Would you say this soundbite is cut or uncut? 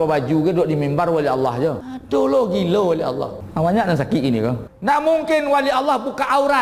cut